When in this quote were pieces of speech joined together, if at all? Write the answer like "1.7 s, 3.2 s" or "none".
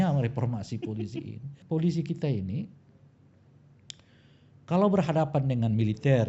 1.5 s